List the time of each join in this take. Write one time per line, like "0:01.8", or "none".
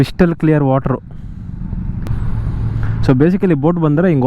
0:02.1